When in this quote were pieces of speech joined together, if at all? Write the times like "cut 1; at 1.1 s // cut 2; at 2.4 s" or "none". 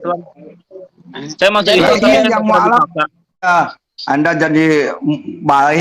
cut 1; at 3.5 s